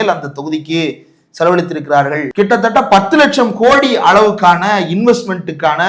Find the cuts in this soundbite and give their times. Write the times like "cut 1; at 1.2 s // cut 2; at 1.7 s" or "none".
cut 1; at 2.2 s